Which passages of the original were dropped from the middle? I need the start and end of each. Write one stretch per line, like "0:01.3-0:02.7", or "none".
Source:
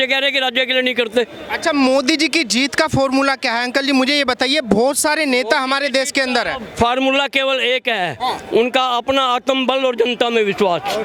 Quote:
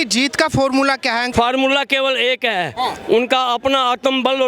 0:03.7-0:06.7